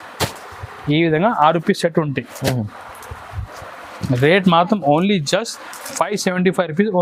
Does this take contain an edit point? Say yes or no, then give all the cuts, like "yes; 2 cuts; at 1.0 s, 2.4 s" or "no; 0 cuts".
no; 0 cuts